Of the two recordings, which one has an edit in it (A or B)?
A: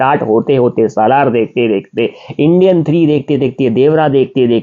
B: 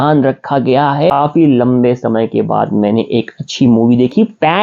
B